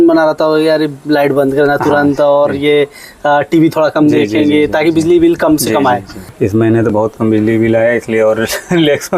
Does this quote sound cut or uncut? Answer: cut